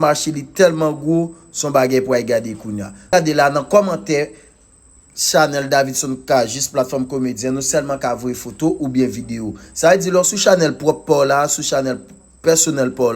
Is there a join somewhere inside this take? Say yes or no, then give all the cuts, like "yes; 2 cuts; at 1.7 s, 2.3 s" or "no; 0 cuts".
yes; 1 cut; at 3.1 s